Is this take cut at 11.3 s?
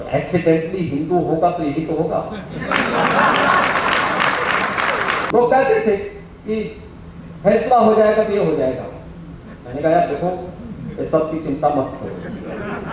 no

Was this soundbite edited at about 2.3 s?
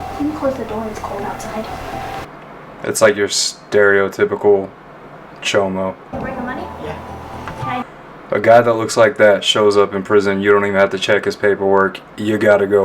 yes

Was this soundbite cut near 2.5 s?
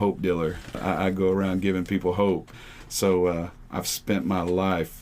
yes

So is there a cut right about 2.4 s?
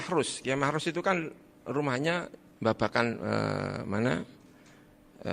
yes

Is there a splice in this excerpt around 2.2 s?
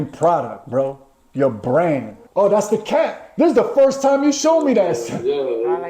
yes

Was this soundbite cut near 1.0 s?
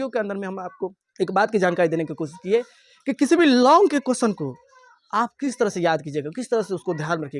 yes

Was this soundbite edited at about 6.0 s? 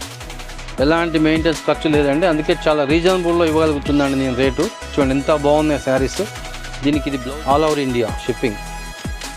no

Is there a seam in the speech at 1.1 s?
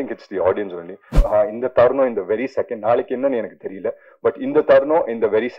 yes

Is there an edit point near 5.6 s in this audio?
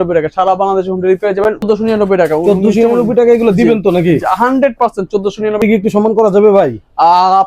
yes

